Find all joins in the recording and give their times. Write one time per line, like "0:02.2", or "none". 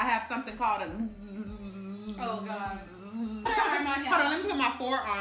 0:03.5